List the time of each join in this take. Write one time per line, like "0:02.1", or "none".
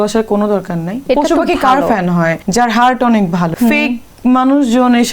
0:01.0
0:02.4
0:03.5